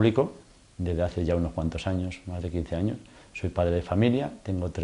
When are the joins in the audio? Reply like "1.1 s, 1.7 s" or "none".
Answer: 2.7 s